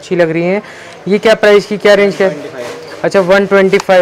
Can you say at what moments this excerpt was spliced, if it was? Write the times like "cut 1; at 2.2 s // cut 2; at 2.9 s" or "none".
none